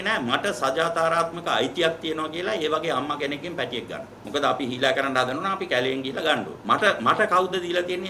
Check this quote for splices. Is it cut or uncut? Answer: cut